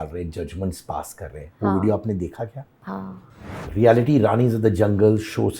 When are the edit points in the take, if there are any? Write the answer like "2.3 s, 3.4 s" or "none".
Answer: 3.1 s